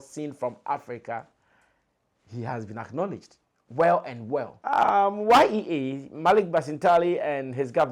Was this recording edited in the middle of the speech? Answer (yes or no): yes